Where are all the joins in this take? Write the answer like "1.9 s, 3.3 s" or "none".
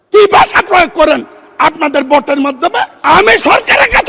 2.9 s